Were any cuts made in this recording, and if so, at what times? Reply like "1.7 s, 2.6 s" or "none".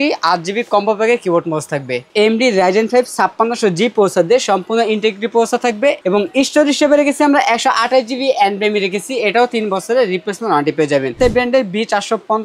2.1 s, 6.0 s, 11.1 s